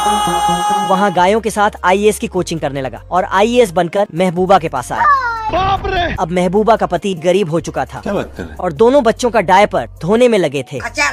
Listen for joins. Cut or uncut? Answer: uncut